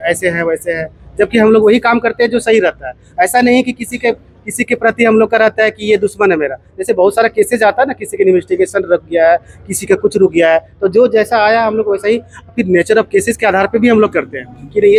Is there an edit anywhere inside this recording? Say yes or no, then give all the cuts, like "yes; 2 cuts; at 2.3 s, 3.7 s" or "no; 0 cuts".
no; 0 cuts